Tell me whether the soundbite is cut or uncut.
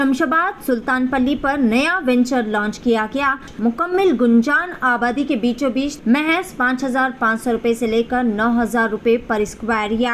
cut